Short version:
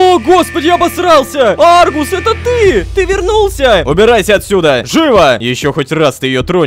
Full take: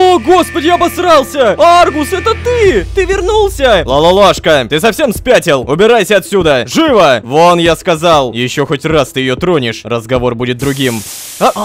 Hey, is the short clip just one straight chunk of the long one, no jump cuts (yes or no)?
no